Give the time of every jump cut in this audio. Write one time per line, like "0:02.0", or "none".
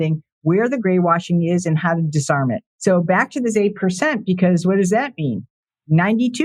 0:00.8
0:02.7